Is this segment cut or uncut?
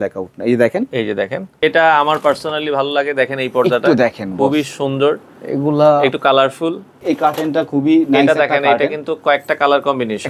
cut